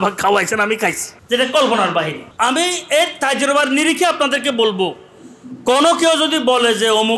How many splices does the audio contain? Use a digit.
2